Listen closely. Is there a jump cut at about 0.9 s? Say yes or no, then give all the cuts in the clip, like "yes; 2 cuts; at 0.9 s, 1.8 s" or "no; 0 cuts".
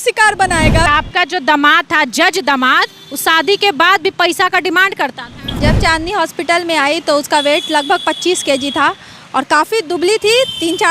yes; 2 cuts; at 0.9 s, 5.4 s